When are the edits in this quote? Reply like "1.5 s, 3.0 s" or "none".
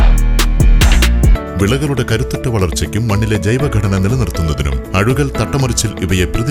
1.4 s